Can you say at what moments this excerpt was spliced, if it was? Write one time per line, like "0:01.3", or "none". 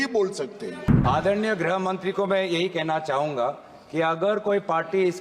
0:00.9